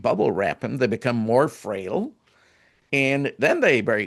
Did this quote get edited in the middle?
no; 0 cuts

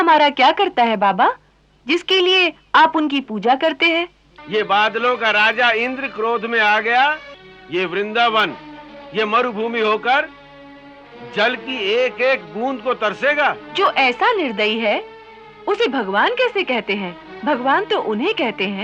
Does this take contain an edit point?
yes; 4 cuts; at 4.3 s, 7.6 s, 13.6 s, 17.2 s

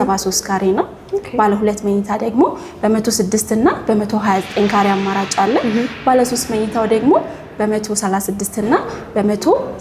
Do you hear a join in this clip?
no; 0 cuts

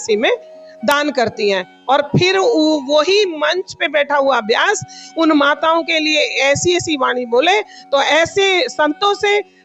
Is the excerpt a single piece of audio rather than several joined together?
yes; 0 cuts

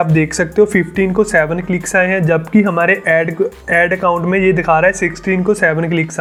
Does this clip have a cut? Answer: no; 0 cuts

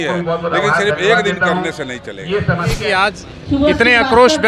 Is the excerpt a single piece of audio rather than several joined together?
no; 1 cut; at 2.8 s

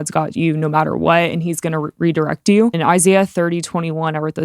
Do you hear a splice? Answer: yes; 1 cut; at 2.8 s

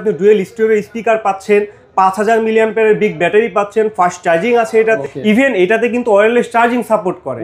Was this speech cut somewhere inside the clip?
yes; 1 cut; at 5.0 s

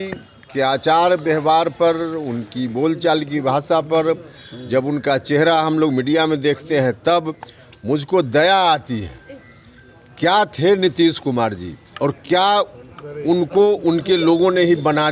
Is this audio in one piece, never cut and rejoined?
yes; 0 cuts

